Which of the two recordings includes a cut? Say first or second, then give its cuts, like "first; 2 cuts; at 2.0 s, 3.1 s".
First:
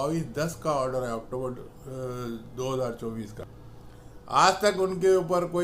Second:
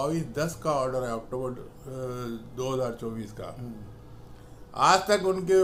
first; 1 cut; at 3.4 s